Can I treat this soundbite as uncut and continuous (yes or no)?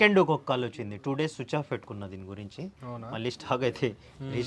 yes